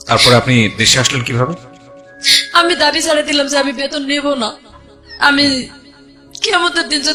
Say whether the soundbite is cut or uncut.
uncut